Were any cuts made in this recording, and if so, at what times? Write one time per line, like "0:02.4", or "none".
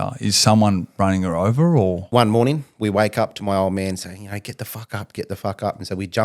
0:02.0